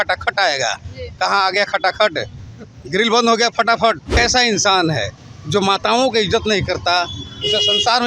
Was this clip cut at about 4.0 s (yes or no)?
yes